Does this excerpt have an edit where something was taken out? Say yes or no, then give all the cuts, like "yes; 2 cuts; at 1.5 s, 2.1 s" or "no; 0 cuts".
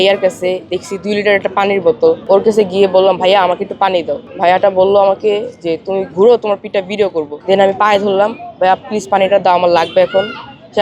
yes; 3 cuts; at 2.2 s, 4.2 s, 7.3 s